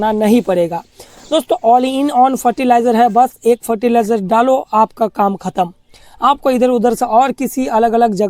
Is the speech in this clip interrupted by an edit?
no; 0 cuts

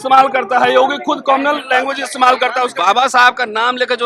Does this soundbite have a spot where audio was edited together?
yes; 1 cut; at 2.7 s

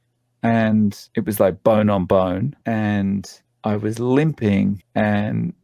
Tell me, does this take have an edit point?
yes; 3 cuts; at 1.1 s, 2.6 s, 4.8 s

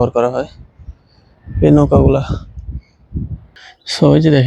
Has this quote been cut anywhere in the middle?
yes; 1 cut; at 3.5 s

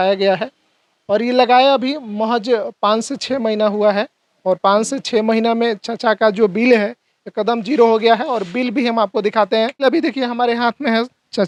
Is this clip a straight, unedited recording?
yes; 0 cuts

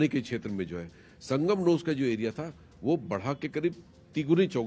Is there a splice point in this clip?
no; 0 cuts

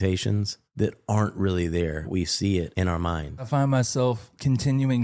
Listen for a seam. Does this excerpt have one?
yes; 2 cuts; at 2.1 s, 3.5 s

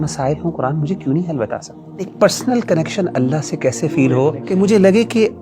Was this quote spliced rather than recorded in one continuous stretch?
yes; 2 cuts; at 2.1 s, 4.4 s

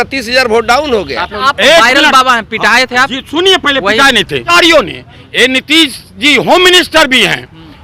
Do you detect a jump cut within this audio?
yes; 2 cuts; at 1.3 s, 4.5 s

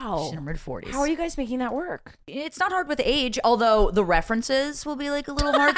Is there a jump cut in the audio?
yes; 1 cut; at 2.1 s

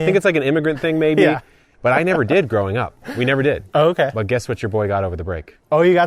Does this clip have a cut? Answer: no; 0 cuts

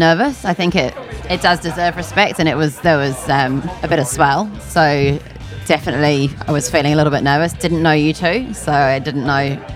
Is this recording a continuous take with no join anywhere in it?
no; 1 cut; at 1.1 s

